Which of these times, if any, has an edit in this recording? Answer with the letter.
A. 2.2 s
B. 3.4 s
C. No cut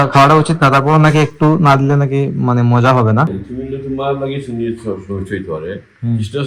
B